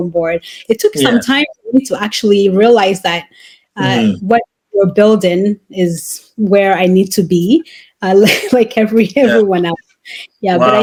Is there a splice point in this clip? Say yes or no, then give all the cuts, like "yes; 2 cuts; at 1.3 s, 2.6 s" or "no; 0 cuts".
no; 0 cuts